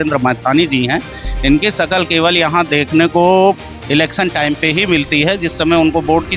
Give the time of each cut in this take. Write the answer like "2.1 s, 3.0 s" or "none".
none